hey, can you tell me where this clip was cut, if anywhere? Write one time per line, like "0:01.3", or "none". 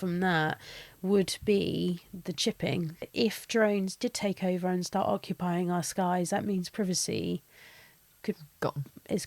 0:03.1

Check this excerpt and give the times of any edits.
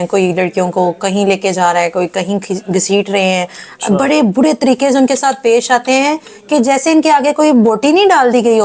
none

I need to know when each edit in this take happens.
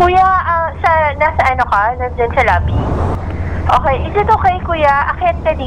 0:03.1

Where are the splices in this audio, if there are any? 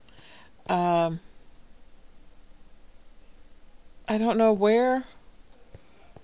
0:05.1

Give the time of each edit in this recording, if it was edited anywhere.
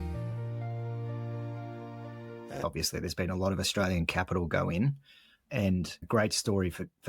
0:02.6

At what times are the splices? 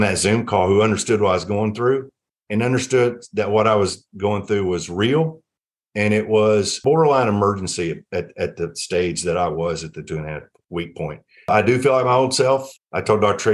0:11.3

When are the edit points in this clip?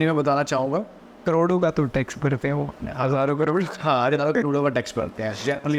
0:01.2

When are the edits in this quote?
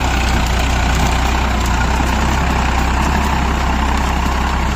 none

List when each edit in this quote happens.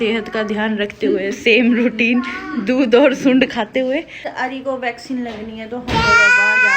0:04.3

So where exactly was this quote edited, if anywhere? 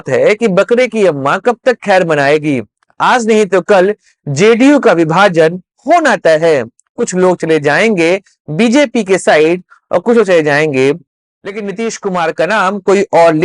0:11.1

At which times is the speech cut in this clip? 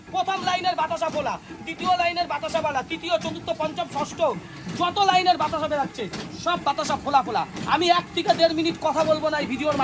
none

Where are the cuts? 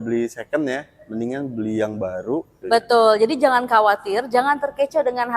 0:02.6

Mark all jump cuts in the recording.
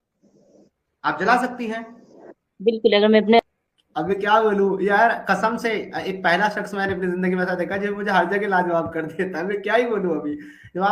0:03.4

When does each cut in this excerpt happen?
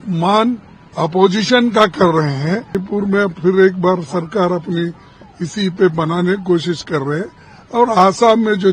0:02.8

